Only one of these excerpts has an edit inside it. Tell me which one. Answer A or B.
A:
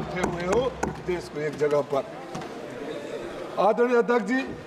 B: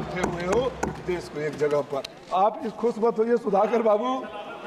B